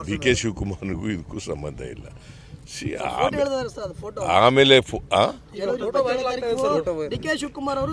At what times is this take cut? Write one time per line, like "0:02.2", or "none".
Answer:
none